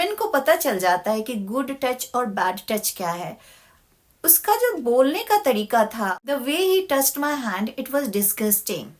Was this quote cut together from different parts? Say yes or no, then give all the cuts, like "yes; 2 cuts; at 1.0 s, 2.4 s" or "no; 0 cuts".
no; 0 cuts